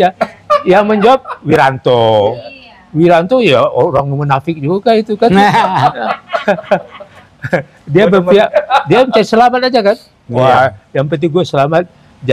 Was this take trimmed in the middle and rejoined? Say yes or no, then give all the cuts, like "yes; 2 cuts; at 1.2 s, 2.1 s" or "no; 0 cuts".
no; 0 cuts